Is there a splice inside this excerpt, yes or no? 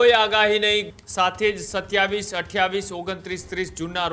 yes